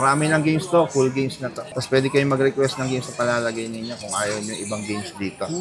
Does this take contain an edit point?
no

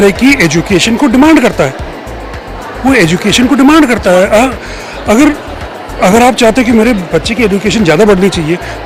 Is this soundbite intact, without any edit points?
yes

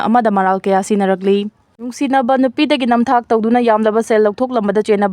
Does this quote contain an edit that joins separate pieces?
yes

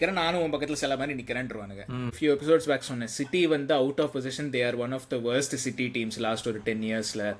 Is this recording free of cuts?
no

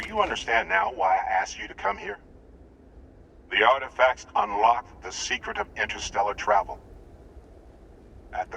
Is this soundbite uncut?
no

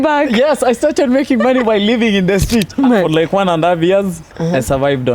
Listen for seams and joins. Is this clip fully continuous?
no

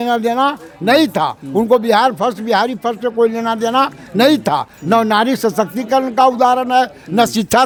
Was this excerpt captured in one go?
yes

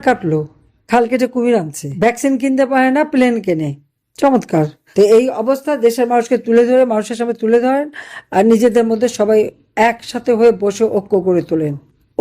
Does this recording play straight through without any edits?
no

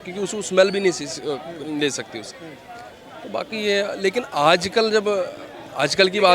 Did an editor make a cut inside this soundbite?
no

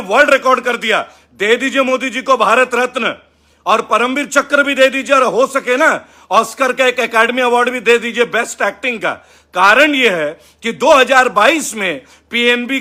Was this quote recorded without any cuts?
yes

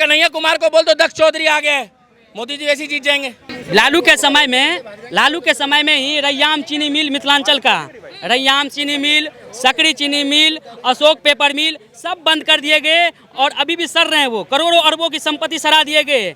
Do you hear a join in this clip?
yes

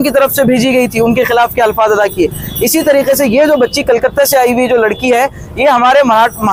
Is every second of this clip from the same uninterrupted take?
yes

